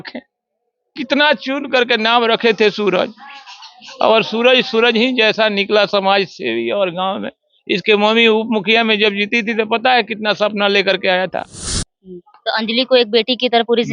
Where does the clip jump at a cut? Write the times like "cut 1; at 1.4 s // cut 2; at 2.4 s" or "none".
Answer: cut 1; at 11.7 s